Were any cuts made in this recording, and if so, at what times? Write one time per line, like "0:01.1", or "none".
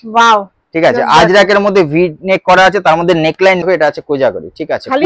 0:03.6

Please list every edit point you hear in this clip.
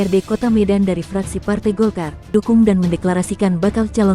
0:02.3

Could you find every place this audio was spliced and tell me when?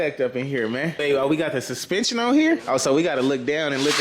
0:01.0
0:02.6

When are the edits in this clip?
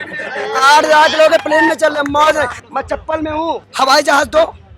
0:02.6
0:03.7

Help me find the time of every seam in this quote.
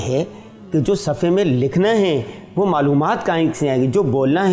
none

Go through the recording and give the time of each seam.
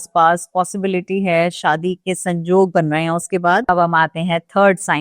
0:03.7

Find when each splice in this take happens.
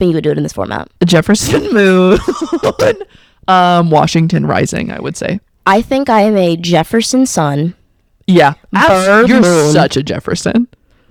none

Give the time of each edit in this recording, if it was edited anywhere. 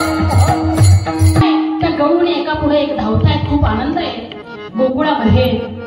0:01.6

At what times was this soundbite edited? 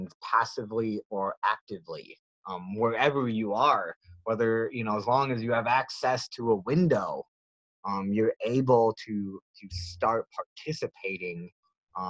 none

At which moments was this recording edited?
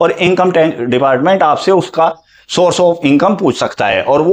none

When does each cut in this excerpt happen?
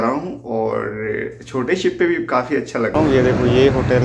0:02.9

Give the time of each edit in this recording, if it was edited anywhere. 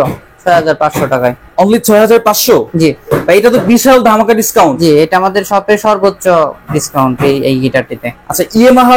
none

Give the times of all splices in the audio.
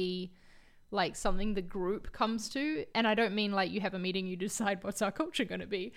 0:02.9

